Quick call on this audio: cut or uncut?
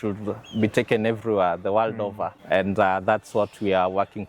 cut